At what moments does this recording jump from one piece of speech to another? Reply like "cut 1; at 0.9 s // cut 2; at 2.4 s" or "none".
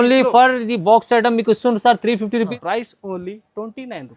cut 1; at 2.5 s